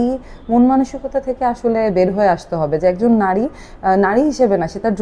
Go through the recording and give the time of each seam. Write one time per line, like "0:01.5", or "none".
none